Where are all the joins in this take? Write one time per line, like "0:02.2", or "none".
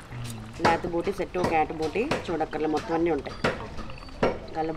none